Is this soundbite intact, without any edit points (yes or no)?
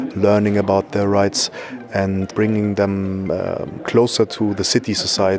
no